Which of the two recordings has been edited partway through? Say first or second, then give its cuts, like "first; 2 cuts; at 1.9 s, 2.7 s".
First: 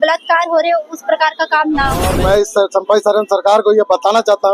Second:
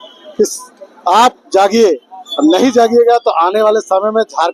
first; 1 cut; at 2.2 s